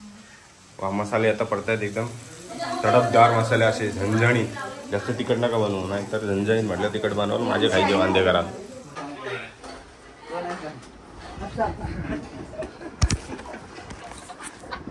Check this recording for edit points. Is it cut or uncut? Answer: uncut